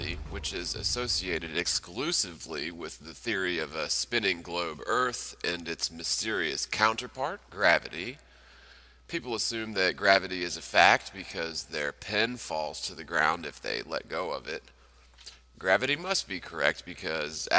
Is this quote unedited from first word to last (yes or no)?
yes